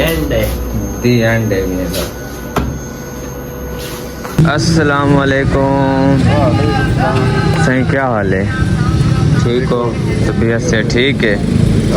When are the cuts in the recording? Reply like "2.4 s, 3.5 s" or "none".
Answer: 4.4 s